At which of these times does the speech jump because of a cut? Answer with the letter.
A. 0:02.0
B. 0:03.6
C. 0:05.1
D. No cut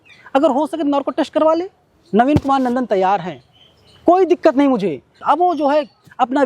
C